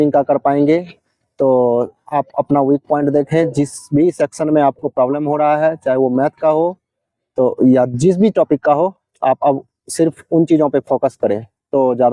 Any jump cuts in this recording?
no; 0 cuts

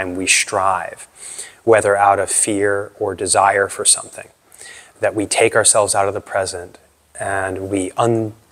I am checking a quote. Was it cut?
no; 0 cuts

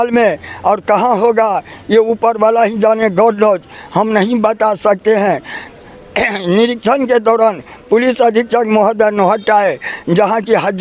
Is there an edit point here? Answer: no; 0 cuts

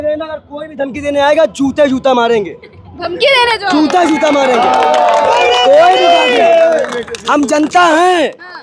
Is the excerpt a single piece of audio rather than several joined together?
yes; 0 cuts

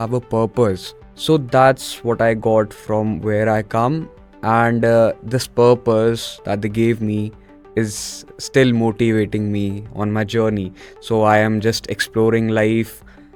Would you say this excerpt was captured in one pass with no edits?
yes; 0 cuts

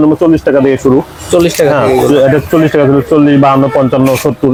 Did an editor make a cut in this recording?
no; 0 cuts

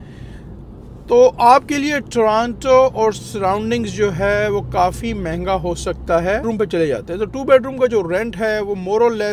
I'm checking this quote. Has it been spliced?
yes; 1 cut; at 6.4 s

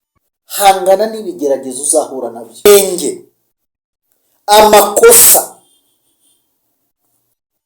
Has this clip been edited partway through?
yes; 1 cut; at 2.7 s

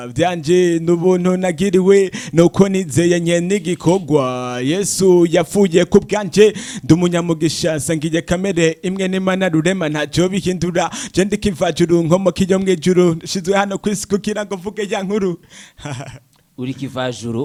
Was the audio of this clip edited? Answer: no; 0 cuts

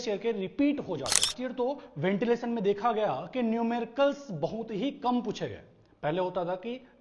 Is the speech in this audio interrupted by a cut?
yes; 1 cut; at 1.4 s

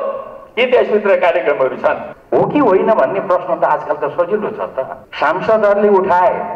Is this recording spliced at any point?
yes; 2 cuts; at 2.1 s, 5.0 s

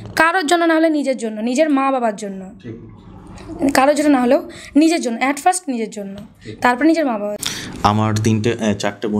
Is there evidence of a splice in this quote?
yes; 1 cut; at 7.3 s

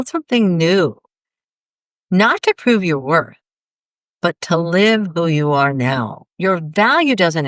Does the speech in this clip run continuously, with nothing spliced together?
no; 1 cut; at 6.2 s

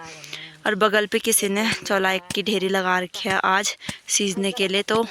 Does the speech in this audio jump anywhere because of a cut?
no; 0 cuts

